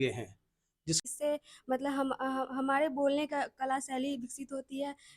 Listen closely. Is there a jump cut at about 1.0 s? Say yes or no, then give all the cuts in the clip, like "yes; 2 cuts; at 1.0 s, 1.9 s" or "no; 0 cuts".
yes; 1 cut; at 1.0 s